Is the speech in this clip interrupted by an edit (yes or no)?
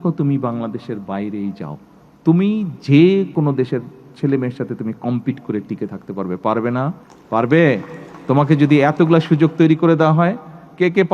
yes